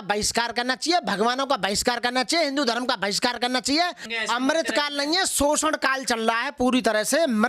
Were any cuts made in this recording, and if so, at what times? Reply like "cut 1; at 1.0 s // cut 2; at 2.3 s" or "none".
cut 1; at 4.1 s